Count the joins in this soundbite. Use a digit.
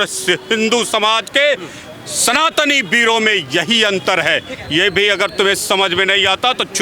0